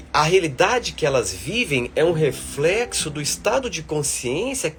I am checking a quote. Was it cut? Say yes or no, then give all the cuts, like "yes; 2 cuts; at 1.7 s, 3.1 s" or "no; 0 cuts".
no; 0 cuts